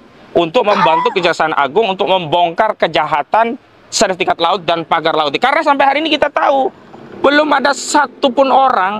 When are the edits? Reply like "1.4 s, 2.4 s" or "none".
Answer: none